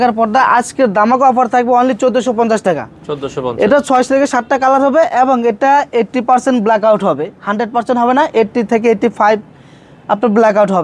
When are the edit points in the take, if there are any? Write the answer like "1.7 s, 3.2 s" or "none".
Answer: none